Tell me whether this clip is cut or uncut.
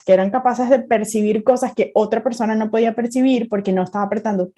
uncut